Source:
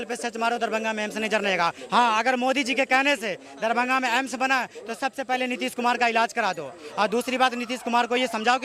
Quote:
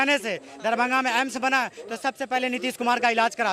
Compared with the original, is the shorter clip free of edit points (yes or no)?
yes